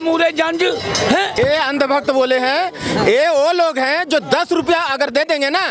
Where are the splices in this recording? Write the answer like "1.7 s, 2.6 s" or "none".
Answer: 1.3 s